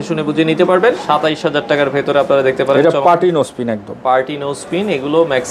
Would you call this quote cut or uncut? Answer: cut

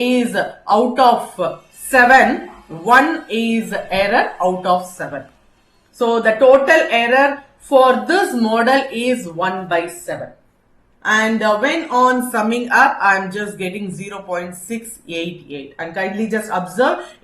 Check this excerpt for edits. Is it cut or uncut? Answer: cut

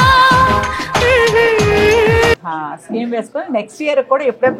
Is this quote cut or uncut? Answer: cut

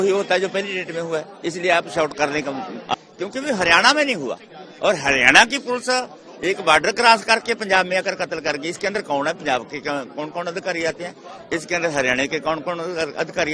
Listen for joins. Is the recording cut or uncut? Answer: cut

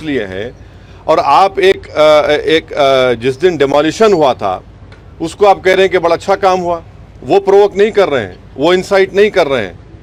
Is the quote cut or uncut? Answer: uncut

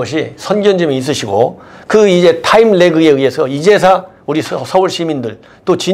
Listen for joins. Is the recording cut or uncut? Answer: uncut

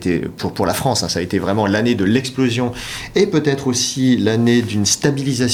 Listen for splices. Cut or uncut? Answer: uncut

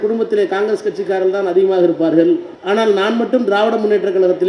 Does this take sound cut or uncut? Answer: cut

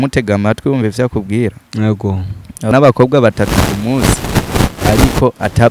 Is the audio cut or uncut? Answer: cut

